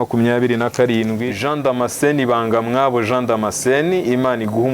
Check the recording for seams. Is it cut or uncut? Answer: cut